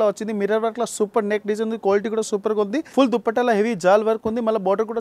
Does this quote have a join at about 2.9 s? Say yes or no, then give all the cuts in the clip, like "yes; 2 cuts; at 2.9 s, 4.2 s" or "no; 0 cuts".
yes; 1 cut; at 2.9 s